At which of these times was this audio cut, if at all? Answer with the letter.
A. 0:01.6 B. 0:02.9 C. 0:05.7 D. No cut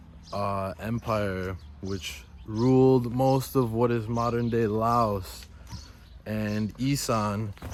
D